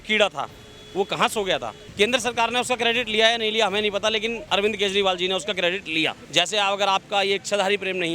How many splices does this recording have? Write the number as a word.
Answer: two